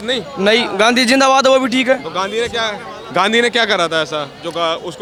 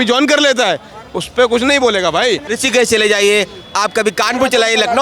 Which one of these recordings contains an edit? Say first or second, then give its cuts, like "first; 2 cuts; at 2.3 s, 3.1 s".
second; 1 cut; at 2.5 s